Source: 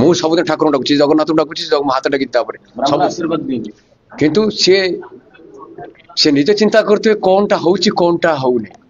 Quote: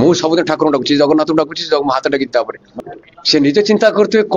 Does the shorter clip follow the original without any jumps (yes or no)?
no